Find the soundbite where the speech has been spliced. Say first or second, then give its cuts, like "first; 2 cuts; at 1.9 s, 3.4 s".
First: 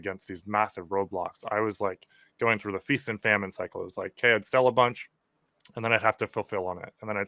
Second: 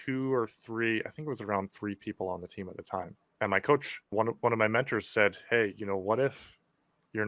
second; 1 cut; at 3.2 s